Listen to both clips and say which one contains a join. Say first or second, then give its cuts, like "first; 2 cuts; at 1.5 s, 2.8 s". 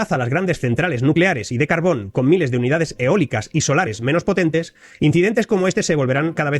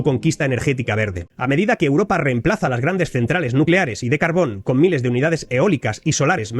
second; 1 cut; at 1.2 s